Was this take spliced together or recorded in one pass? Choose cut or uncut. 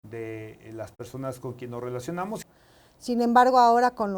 cut